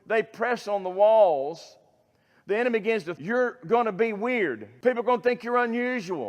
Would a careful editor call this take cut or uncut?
cut